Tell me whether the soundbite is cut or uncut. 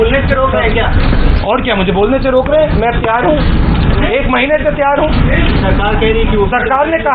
uncut